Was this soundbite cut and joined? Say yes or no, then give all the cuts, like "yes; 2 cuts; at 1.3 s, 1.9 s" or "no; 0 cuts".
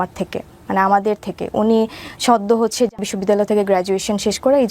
yes; 1 cut; at 3.1 s